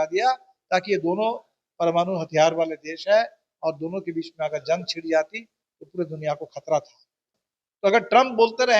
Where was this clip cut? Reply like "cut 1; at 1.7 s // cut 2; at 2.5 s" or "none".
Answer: cut 1; at 7.2 s